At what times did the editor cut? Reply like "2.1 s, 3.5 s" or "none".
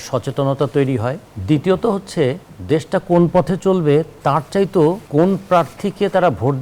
1.3 s, 2.5 s, 5.0 s